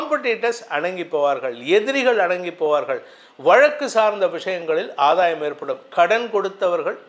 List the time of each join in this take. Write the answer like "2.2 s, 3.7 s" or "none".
none